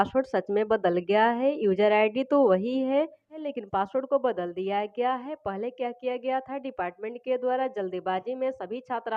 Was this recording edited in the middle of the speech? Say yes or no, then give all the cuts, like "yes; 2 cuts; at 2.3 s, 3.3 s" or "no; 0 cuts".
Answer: no; 0 cuts